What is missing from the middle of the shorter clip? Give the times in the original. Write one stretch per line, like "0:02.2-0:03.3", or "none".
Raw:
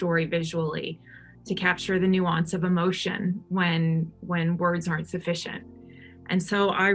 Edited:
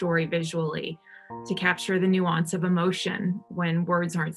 0:03.4-0:04.2